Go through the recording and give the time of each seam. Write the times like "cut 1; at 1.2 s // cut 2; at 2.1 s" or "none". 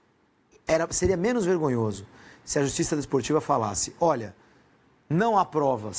none